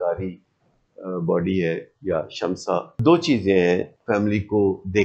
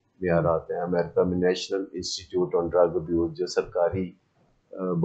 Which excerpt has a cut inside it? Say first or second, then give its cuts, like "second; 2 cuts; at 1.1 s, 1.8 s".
first; 2 cuts; at 3.0 s, 3.9 s